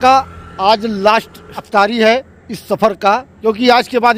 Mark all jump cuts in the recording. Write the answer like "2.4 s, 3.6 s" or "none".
none